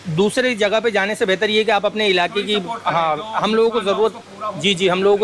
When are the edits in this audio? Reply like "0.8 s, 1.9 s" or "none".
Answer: none

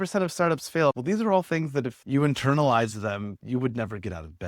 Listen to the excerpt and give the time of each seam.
1.0 s, 3.4 s

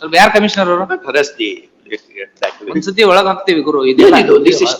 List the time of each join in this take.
none

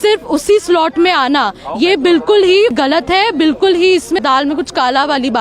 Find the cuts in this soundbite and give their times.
2.8 s, 4.2 s

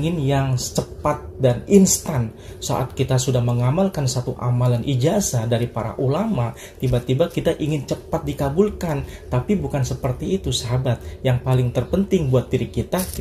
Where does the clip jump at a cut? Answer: none

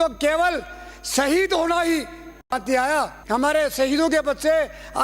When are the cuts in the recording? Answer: 3.2 s

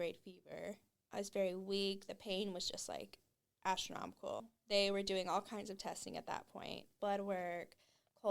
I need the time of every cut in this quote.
0.9 s, 4.4 s, 6.9 s

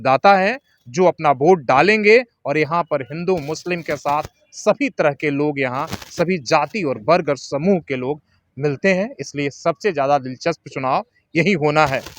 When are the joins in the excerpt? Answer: none

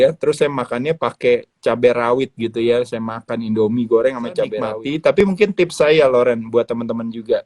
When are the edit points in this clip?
5.2 s

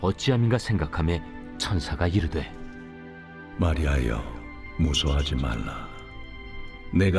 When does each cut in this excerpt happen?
1.3 s

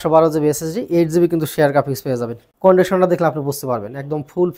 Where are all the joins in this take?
2.4 s

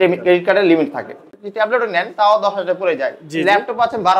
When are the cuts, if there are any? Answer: 1.2 s

